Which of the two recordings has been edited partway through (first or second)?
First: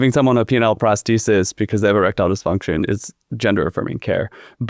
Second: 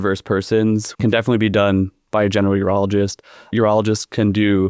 second